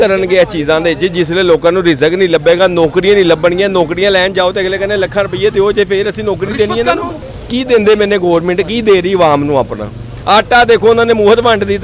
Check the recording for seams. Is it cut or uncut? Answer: cut